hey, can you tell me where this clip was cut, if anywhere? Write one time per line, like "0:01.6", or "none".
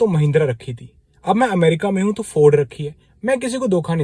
none